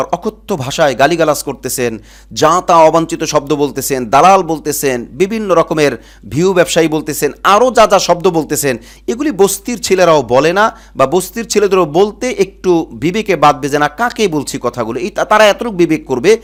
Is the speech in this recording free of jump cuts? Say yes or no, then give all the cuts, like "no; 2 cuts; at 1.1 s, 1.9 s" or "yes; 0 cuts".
yes; 0 cuts